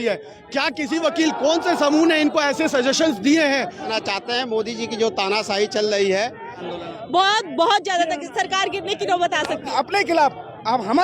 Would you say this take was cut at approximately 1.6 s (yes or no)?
no